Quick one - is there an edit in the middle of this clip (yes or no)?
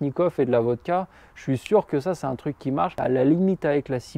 yes